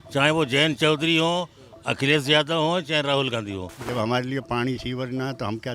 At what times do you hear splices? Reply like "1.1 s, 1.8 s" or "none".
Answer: 3.7 s